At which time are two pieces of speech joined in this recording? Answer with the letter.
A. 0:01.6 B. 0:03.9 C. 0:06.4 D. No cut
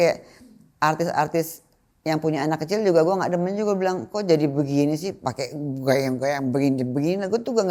D